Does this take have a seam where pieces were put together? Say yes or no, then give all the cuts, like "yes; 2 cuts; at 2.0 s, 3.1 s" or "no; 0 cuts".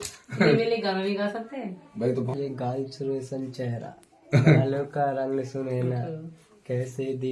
yes; 1 cut; at 2.3 s